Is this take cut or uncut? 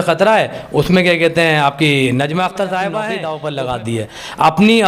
cut